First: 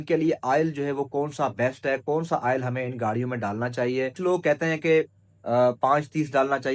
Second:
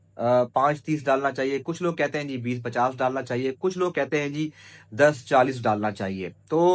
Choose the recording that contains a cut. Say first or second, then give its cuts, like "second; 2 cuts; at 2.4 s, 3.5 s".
first; 1 cut; at 4.2 s